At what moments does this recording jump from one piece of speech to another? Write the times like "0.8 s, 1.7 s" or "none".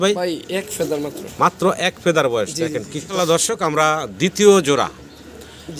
3.0 s